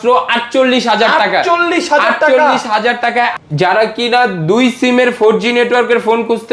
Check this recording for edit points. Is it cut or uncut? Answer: cut